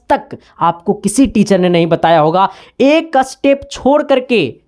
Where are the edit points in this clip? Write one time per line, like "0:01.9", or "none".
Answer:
0:02.6